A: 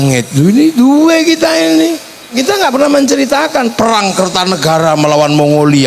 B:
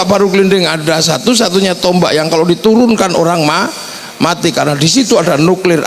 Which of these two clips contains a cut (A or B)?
A